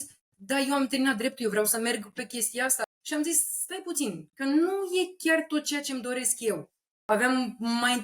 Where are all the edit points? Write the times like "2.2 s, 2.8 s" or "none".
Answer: 2.8 s, 7.1 s